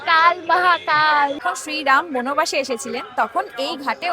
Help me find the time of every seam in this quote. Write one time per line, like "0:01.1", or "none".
0:01.4